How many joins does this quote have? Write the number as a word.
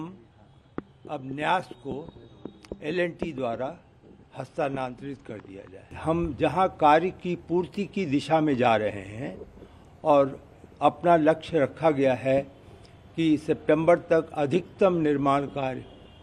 one